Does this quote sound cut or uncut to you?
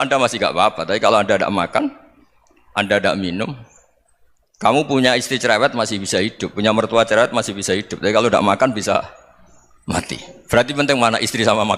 uncut